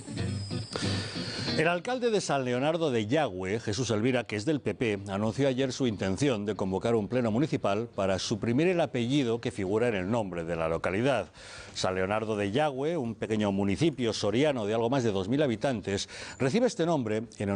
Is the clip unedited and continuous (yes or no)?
no